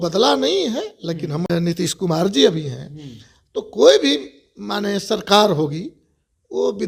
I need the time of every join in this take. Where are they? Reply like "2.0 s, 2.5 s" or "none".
1.5 s